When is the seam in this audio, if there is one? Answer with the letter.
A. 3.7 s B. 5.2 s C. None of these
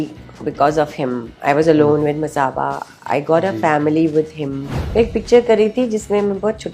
B